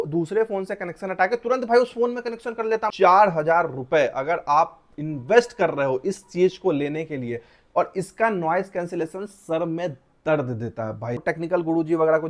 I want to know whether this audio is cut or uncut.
cut